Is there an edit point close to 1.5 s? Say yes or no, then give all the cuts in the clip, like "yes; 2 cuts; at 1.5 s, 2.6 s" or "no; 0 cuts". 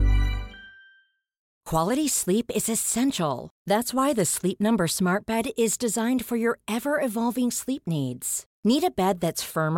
yes; 1 cut; at 1.5 s